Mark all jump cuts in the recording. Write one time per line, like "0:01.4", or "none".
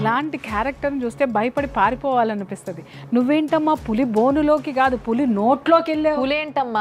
none